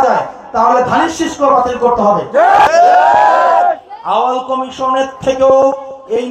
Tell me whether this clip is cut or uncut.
cut